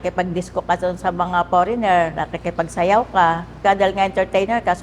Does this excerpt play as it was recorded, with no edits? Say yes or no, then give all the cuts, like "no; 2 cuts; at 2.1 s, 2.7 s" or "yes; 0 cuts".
no; 1 cut; at 3.6 s